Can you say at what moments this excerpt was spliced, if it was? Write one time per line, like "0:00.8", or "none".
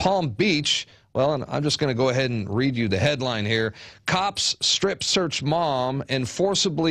0:03.1